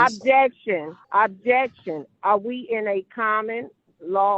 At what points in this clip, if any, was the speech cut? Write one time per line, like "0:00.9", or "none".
0:01.0